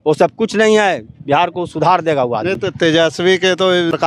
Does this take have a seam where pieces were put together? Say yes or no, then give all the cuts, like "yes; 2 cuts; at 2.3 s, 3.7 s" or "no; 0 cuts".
no; 0 cuts